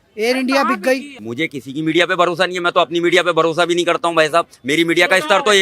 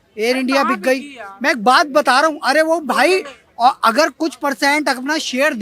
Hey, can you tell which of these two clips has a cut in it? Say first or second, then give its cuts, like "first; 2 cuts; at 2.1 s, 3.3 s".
first; 1 cut; at 1.2 s